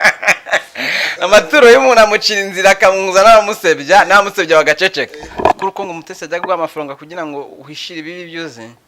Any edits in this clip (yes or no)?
yes